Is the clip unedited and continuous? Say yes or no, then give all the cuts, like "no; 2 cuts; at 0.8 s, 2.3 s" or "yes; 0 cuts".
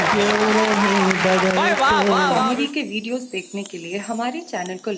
no; 1 cut; at 2.4 s